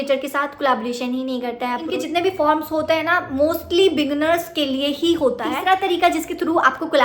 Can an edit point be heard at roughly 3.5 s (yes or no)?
no